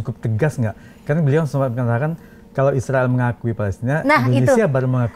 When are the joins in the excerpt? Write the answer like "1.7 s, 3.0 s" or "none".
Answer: none